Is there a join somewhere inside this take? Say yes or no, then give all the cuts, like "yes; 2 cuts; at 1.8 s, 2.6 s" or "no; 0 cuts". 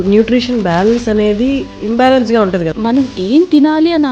yes; 2 cuts; at 1.7 s, 2.7 s